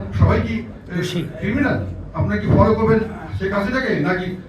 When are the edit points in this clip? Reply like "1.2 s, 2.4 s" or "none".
2.0 s, 3.2 s